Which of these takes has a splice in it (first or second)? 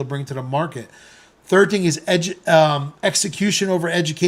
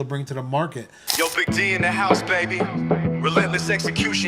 second